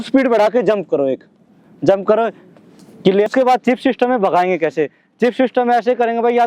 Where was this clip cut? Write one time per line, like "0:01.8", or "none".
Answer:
0:03.3